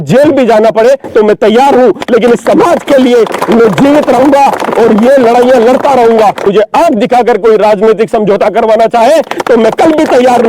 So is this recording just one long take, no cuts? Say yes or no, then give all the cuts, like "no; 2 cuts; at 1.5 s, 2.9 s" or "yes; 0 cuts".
no; 1 cut; at 6.4 s